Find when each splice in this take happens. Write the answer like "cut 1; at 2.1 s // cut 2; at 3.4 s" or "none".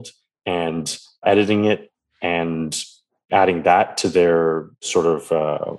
cut 1; at 1.2 s // cut 2; at 3.3 s // cut 3; at 4.9 s